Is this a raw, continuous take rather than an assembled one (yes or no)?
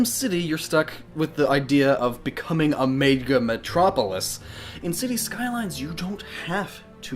yes